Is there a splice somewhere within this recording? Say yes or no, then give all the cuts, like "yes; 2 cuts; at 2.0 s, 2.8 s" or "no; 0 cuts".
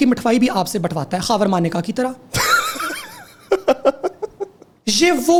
no; 0 cuts